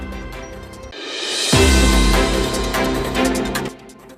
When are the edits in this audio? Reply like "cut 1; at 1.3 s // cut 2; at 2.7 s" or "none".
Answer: none